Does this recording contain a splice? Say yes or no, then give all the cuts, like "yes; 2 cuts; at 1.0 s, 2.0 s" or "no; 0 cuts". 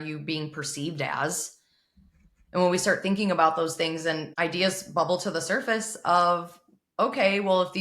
yes; 1 cut; at 4.3 s